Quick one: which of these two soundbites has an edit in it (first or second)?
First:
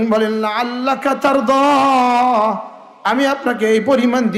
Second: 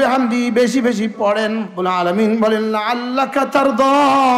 second